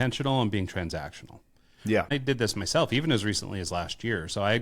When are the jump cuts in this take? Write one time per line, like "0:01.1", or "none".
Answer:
0:02.1